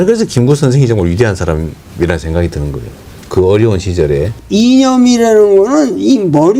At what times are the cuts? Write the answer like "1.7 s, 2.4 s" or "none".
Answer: 1.8 s, 4.4 s